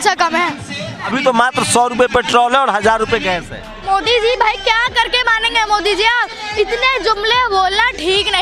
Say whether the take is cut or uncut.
cut